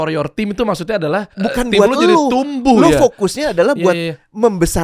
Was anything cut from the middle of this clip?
yes; 1 cut; at 1.3 s

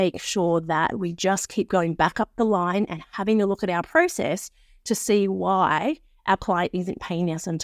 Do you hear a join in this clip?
no; 0 cuts

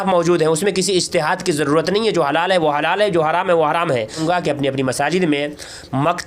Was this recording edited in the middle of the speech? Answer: yes; 1 cut; at 4.2 s

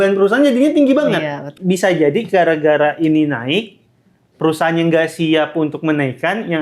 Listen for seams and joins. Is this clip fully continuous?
no; 1 cut; at 1.5 s

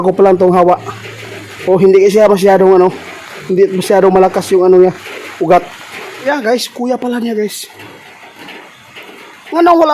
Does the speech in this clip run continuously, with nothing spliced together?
no; 1 cut; at 6.2 s

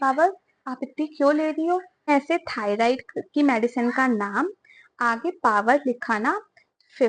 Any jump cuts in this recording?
yes; 1 cut; at 2.1 s

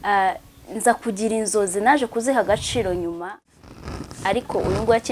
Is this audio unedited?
no; 1 cut; at 3.3 s

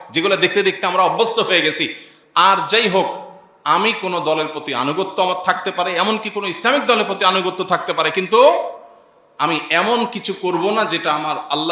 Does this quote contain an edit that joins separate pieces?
no; 0 cuts

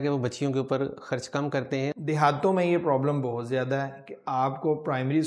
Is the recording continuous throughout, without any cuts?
no; 1 cut; at 1.9 s

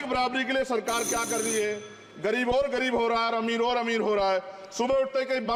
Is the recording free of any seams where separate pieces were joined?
yes; 0 cuts

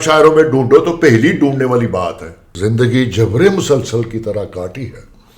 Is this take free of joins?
no; 1 cut; at 2.5 s

